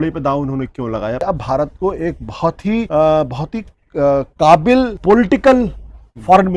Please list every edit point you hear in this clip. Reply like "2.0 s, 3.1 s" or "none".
1.2 s, 2.9 s, 4.9 s